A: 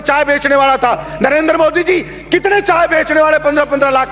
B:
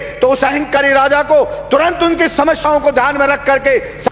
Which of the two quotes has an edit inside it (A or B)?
A